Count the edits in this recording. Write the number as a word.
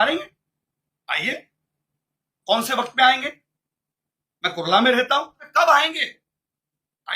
one